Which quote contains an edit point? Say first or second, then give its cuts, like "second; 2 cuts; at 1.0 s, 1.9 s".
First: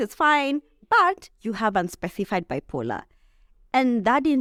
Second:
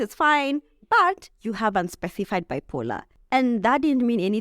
second; 1 cut; at 3.1 s